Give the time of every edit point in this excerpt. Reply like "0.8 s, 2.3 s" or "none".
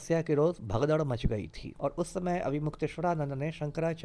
1.6 s